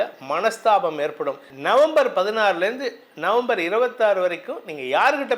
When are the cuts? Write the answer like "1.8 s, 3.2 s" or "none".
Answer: 1.5 s